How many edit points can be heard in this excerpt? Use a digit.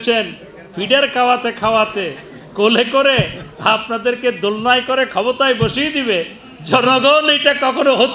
0